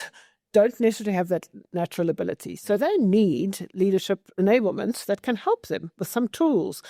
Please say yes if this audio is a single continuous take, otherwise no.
yes